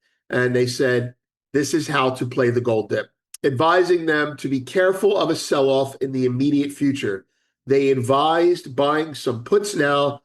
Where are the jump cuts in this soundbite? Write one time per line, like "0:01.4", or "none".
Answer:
0:03.2